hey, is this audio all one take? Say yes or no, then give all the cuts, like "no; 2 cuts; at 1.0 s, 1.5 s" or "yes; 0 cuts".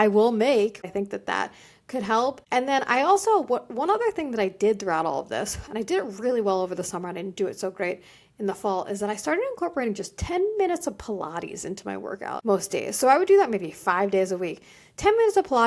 no; 3 cuts; at 0.9 s, 2.4 s, 12.4 s